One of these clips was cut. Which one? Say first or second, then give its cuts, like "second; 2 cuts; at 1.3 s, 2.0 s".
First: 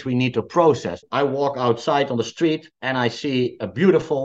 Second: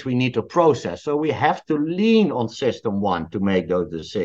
first; 1 cut; at 1.0 s